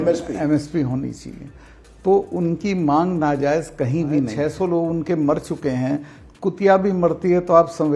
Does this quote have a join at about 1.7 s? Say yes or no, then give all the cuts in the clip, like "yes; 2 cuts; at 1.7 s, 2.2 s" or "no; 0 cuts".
no; 1 cut; at 4.3 s